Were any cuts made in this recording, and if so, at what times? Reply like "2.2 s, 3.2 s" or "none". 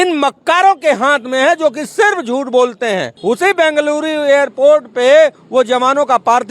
3.1 s